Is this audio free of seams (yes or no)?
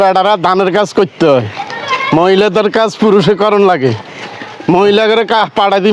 yes